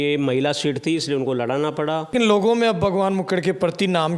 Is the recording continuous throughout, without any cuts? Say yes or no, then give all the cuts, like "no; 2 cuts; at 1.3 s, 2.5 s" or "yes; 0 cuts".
no; 1 cut; at 2.1 s